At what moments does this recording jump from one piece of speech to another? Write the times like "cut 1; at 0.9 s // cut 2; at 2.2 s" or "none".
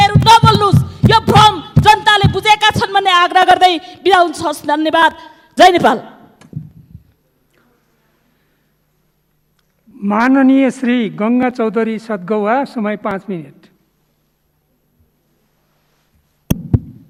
none